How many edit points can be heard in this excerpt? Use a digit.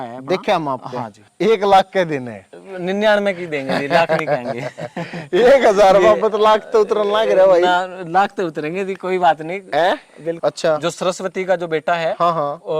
2